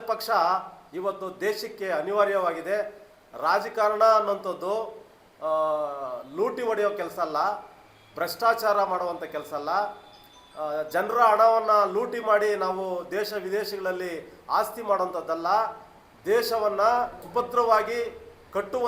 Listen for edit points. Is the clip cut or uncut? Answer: cut